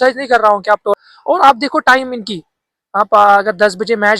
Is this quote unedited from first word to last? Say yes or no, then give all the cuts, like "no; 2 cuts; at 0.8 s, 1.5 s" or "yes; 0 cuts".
no; 1 cut; at 1.0 s